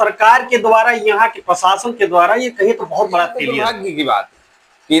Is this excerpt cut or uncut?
cut